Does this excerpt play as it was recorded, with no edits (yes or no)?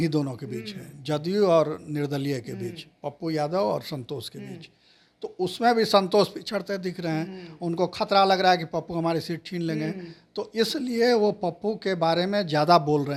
yes